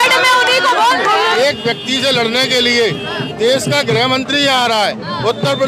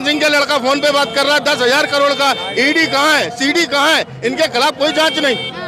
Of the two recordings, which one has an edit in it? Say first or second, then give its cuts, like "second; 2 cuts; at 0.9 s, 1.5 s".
first; 1 cut; at 1.4 s